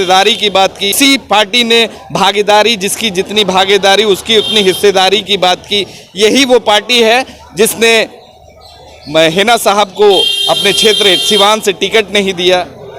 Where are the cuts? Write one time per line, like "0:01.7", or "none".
0:00.9